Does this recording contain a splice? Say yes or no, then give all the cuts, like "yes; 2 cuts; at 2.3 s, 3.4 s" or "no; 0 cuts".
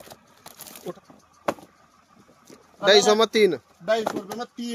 yes; 1 cut; at 0.9 s